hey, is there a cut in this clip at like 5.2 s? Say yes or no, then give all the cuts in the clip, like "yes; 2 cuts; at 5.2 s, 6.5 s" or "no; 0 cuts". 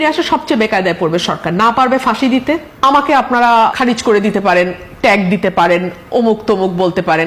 no; 2 cuts; at 2.7 s, 3.8 s